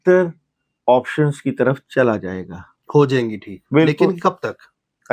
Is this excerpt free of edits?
yes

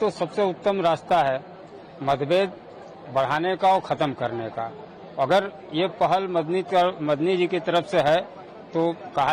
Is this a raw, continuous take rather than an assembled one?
yes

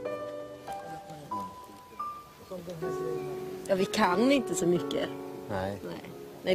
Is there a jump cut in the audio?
yes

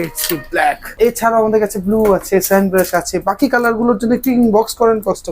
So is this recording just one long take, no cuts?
no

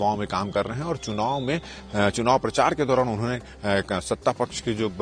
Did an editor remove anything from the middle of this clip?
no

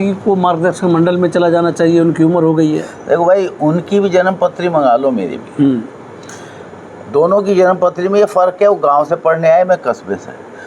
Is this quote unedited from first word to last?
yes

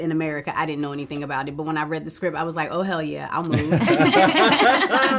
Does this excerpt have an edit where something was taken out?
no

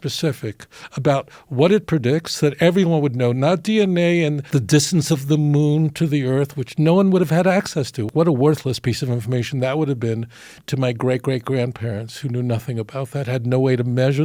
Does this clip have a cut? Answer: no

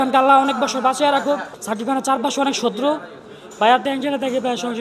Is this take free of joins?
no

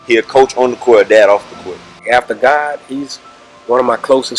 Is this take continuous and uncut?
no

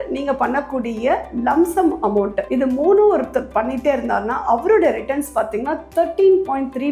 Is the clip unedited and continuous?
yes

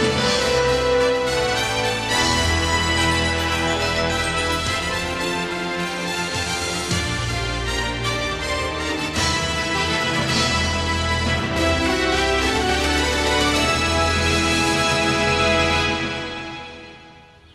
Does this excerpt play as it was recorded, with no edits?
no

